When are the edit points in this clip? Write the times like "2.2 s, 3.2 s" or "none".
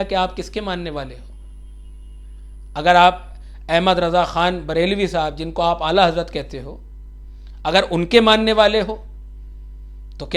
none